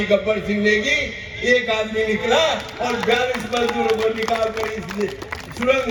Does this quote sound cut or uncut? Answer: uncut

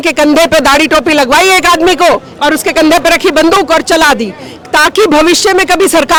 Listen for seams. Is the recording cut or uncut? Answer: uncut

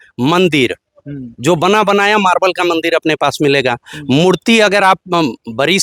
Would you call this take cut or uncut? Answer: uncut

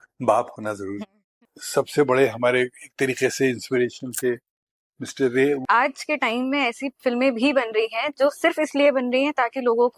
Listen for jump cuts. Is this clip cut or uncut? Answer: cut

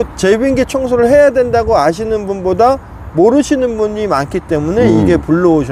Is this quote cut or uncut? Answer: uncut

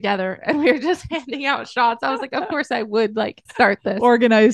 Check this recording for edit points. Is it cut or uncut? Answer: cut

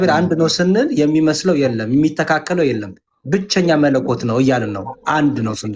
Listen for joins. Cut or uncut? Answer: uncut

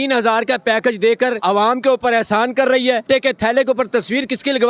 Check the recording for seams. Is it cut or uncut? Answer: cut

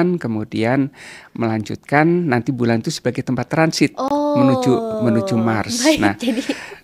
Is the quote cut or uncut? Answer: uncut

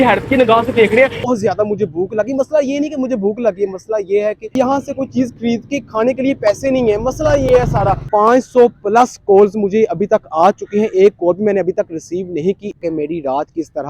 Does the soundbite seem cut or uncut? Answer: cut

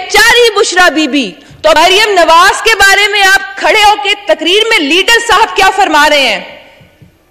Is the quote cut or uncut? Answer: cut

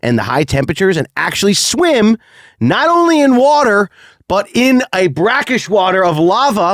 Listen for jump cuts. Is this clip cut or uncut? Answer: uncut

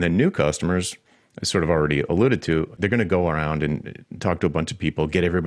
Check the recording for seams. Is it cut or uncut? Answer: cut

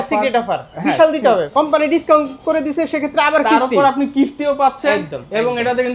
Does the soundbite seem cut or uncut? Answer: cut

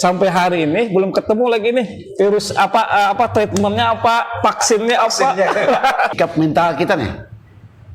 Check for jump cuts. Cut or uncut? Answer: cut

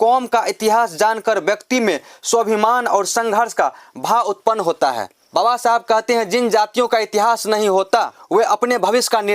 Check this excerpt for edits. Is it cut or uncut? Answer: cut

